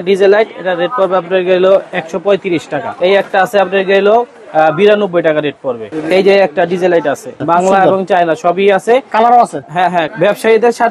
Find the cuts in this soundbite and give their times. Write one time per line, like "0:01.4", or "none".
0:02.8
0:05.8
0:07.3
0:10.1